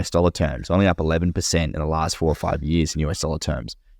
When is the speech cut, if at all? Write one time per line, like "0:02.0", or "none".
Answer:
none

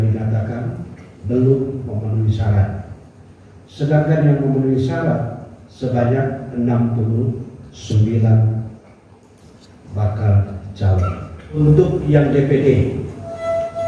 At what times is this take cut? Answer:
0:11.6

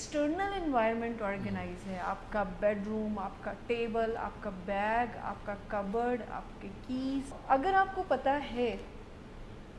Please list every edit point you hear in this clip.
0:07.4

